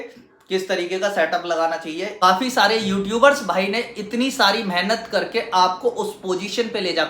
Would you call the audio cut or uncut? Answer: cut